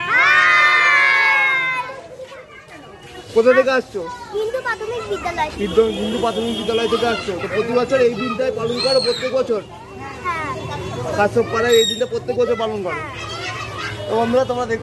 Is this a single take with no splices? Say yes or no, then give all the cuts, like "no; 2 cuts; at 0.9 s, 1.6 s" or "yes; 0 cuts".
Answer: no; 1 cut; at 3.2 s